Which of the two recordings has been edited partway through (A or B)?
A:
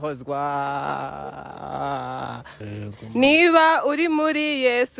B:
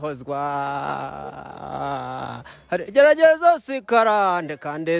A